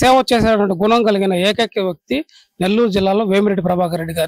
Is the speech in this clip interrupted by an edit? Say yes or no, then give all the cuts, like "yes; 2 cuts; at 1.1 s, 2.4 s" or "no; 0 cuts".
no; 0 cuts